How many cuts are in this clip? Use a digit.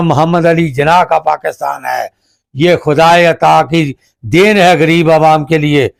0